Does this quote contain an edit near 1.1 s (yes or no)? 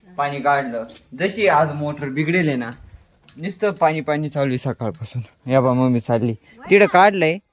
no